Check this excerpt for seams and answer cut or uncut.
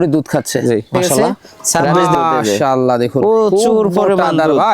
cut